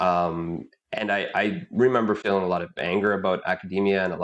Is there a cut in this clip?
yes; 1 cut; at 2.8 s

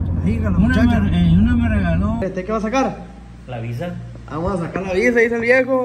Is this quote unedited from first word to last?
no; 1 cut; at 2.2 s

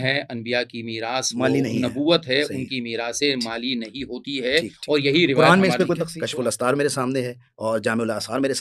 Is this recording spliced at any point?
yes; 1 cut; at 6.1 s

